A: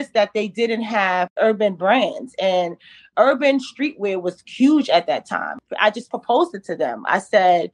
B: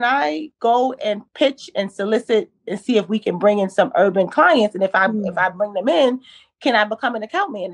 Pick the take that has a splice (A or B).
A